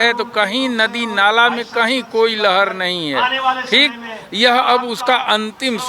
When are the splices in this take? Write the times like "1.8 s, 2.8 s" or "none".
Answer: none